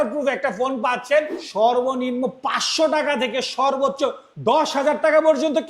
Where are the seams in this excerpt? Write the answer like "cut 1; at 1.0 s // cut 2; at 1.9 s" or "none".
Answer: cut 1; at 1.4 s // cut 2; at 4.3 s